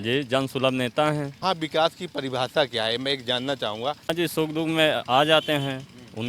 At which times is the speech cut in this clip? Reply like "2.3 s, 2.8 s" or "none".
1.4 s, 4.1 s